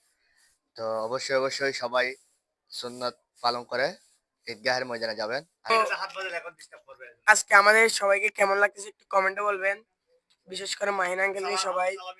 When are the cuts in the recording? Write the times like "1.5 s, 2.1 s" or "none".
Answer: 5.7 s